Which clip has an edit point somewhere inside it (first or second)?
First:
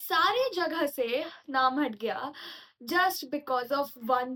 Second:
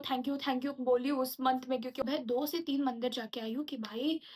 second